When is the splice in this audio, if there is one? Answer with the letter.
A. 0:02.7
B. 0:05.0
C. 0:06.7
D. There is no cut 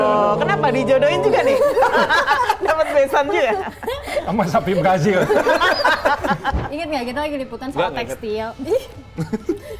C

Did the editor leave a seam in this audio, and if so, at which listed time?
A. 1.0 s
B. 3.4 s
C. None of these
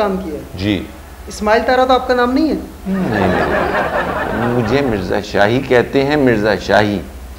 C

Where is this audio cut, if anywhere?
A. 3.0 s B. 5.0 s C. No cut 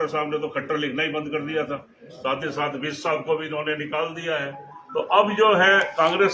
C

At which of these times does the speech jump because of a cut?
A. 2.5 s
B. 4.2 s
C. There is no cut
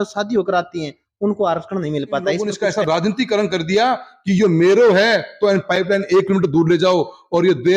A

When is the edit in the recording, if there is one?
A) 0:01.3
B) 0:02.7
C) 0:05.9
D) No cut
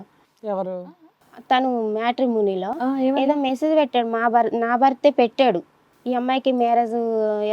C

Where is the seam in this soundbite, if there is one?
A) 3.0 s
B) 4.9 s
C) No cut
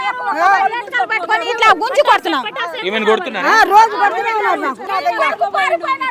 B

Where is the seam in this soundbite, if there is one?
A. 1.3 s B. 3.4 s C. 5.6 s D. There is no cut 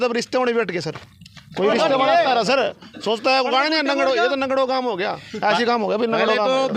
D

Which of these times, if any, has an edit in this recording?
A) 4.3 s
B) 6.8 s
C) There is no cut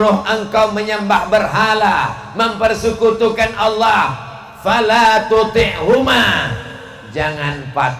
C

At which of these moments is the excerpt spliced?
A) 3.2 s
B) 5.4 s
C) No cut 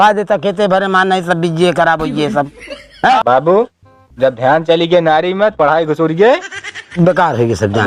A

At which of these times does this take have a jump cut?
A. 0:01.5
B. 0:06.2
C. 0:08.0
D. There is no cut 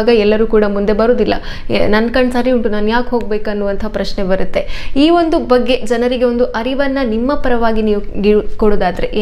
D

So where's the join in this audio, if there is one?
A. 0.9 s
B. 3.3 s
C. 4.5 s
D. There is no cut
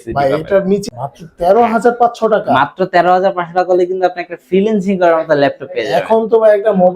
A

